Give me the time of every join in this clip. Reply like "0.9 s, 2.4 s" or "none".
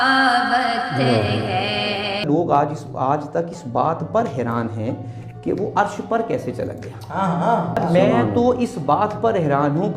2.2 s, 7.8 s